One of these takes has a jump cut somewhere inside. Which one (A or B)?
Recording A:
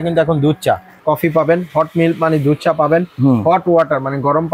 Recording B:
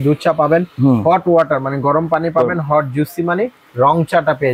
A